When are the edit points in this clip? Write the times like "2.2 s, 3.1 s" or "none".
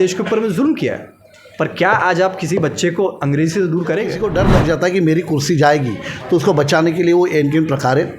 4.2 s